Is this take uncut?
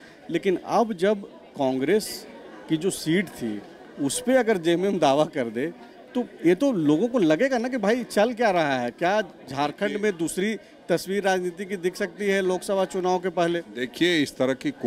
yes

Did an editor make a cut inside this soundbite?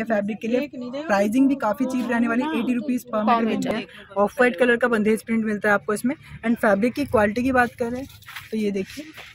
yes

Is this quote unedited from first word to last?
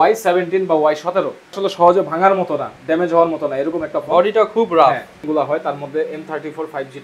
no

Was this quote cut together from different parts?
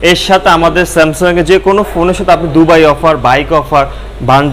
no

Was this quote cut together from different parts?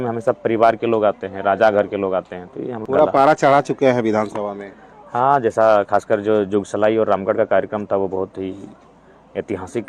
yes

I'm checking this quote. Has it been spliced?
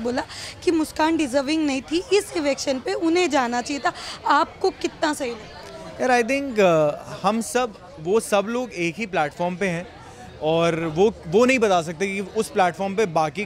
no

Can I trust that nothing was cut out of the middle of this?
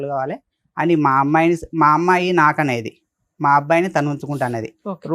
yes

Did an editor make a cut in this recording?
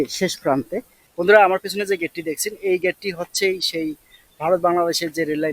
yes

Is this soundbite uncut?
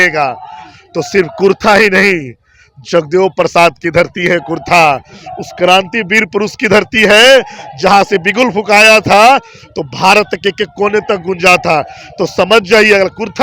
yes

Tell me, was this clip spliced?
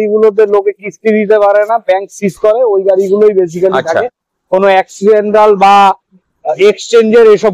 no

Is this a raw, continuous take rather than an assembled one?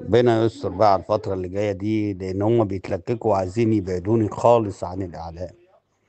yes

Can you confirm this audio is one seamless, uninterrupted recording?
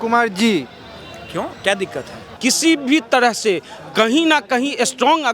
no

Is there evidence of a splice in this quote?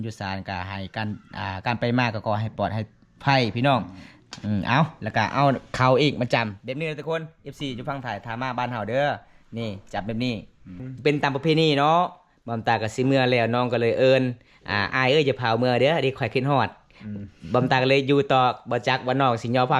yes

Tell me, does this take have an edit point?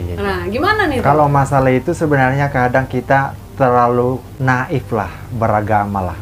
yes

